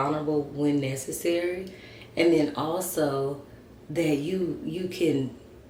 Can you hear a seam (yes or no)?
no